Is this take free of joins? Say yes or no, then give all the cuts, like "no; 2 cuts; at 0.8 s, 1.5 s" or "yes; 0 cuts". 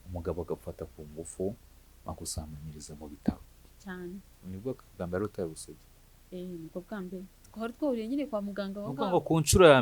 no; 2 cuts; at 4.3 s, 7.4 s